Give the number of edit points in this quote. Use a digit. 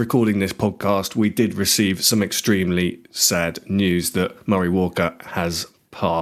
0